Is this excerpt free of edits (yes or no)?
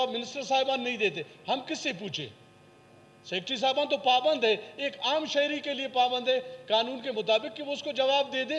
yes